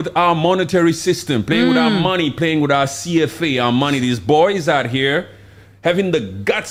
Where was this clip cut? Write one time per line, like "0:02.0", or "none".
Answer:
none